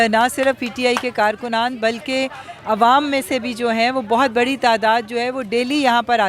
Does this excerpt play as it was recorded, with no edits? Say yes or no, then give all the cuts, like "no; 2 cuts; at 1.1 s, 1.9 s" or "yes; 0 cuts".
yes; 0 cuts